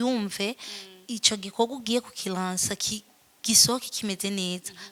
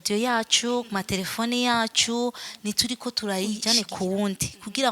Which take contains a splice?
second; 1 cut; at 3.6 s

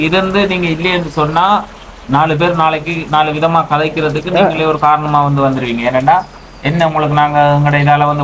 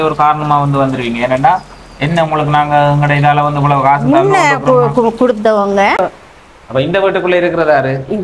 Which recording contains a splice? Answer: second; 1 cut; at 6.0 s

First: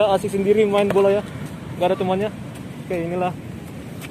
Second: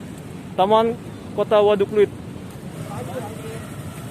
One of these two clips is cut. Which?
second; 1 cut; at 2.8 s

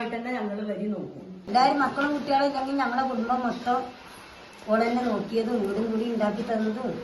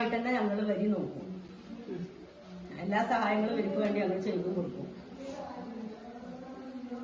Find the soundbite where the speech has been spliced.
first; 1 cut; at 1.5 s

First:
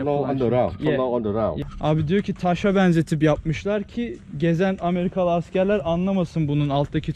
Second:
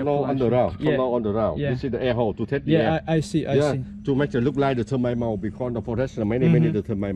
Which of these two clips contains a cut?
first; 1 cut; at 1.6 s

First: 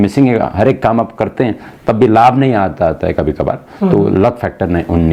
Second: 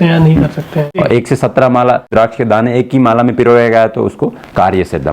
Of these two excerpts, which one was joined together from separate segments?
second; 2 cuts; at 1.0 s, 2.1 s

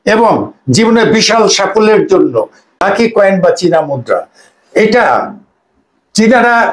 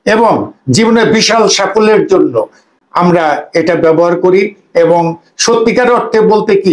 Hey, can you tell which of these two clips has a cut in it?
first; 1 cut; at 2.8 s

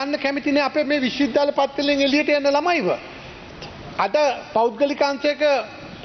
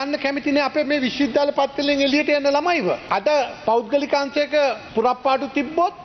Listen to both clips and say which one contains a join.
second; 2 cuts; at 3.0 s, 4.8 s

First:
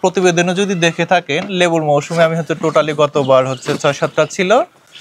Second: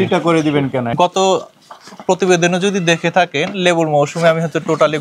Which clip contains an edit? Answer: second; 1 cut; at 0.9 s

